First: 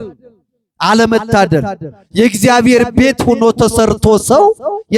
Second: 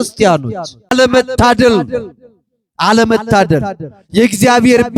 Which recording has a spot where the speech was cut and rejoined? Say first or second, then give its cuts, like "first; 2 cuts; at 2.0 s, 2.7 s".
second; 1 cut; at 0.9 s